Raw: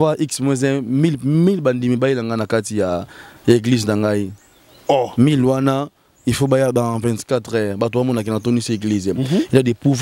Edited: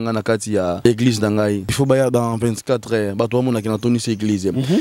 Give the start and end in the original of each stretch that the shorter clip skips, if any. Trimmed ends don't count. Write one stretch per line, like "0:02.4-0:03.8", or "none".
0:03.1-0:03.5
0:04.4-0:06.4